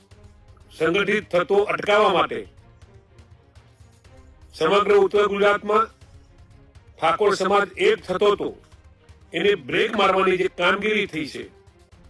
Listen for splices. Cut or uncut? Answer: uncut